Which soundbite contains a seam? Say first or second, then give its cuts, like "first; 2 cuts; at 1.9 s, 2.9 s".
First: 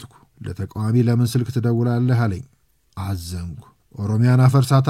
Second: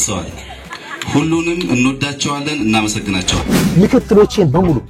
second; 1 cut; at 3.3 s